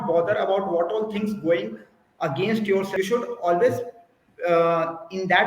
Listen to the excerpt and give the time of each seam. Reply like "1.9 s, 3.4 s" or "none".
2.9 s